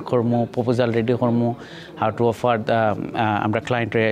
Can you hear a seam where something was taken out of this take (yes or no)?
no